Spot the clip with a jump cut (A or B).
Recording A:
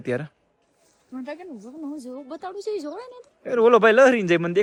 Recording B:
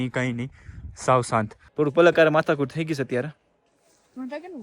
B